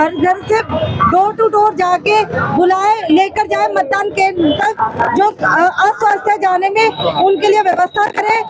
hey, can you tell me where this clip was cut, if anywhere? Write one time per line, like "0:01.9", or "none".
none